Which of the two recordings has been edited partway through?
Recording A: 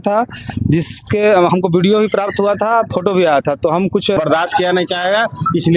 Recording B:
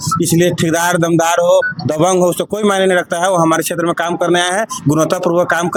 A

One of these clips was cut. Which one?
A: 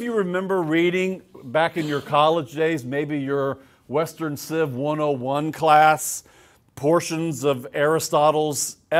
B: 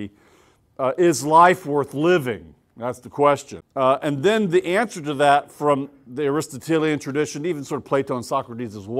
B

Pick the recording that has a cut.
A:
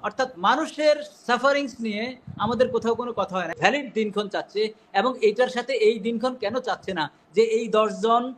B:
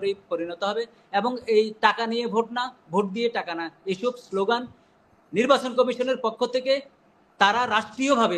A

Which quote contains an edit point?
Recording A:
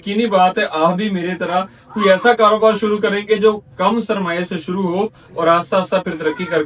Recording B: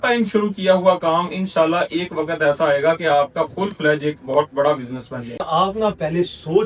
B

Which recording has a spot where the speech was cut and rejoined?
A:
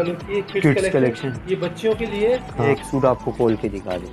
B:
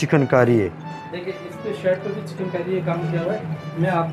A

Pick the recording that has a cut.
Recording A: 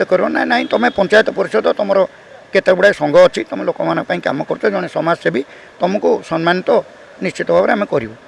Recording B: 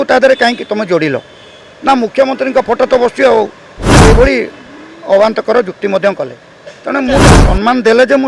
B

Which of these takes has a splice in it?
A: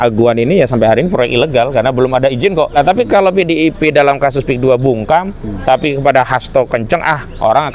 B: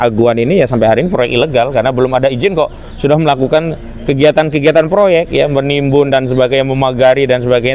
A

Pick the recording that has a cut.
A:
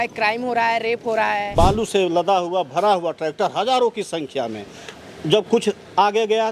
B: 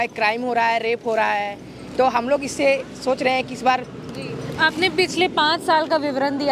A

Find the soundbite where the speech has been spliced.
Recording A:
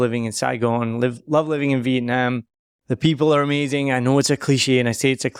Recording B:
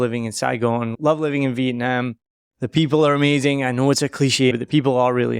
B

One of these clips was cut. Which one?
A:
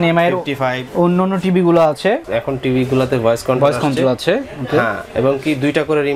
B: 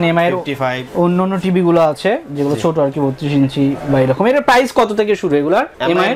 A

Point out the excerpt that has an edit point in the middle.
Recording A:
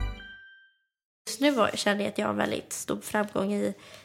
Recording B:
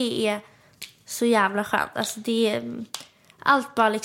A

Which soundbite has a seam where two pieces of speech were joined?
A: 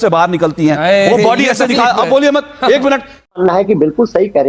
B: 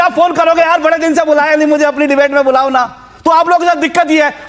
A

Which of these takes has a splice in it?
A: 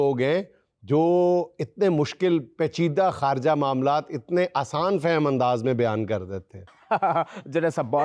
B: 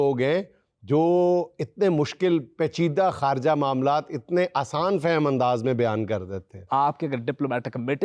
B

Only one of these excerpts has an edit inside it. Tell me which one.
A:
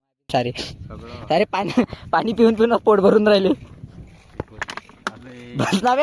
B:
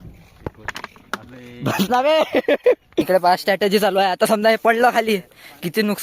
B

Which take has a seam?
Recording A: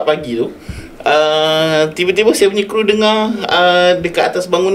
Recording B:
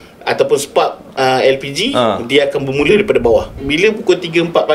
B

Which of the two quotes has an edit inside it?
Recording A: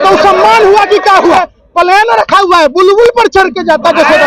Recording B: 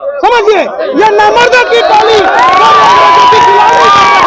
A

